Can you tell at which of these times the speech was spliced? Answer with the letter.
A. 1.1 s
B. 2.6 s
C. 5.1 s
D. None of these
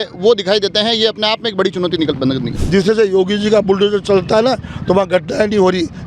B